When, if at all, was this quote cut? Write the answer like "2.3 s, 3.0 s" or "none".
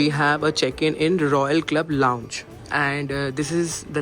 2.5 s